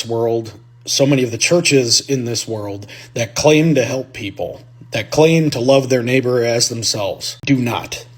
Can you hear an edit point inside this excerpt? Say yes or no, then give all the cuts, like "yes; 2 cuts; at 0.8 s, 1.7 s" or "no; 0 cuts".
yes; 1 cut; at 7.3 s